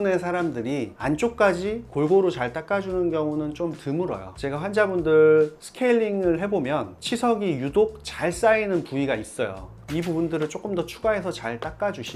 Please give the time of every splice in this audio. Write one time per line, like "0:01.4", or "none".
0:01.0
0:04.2
0:09.8